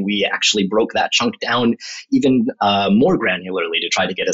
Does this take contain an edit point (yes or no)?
no